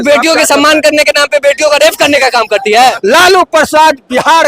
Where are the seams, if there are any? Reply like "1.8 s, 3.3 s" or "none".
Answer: 3.0 s